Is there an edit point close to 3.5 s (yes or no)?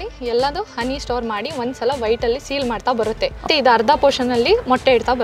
yes